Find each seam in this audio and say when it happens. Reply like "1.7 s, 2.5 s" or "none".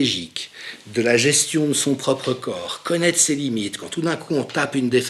none

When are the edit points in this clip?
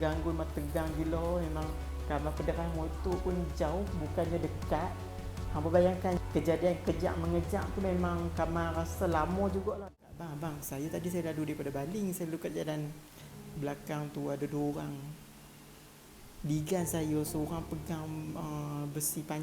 9.9 s

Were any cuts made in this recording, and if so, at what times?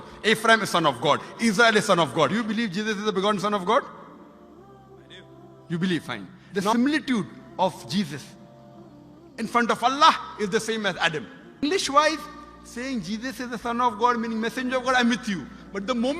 2.3 s, 6.7 s, 11.6 s

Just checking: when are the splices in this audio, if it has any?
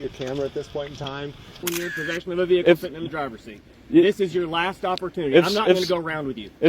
1.6 s

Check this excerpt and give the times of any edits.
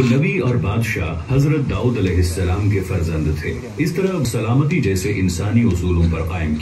4.2 s

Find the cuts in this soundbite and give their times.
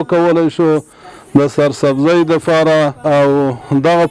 3.0 s

